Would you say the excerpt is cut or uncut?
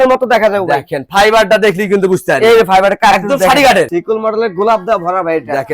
cut